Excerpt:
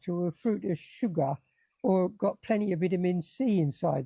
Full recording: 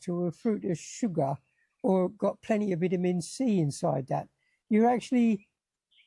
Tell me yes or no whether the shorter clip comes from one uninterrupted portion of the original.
yes